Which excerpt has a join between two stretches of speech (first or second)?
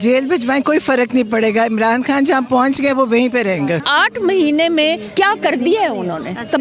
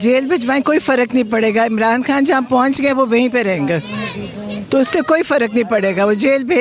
first